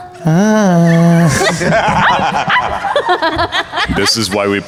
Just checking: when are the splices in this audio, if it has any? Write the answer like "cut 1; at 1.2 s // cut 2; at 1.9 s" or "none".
none